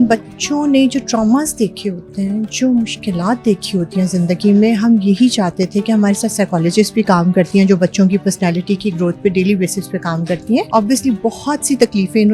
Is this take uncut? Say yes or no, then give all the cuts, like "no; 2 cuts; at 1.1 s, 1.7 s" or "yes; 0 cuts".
no; 1 cut; at 10.7 s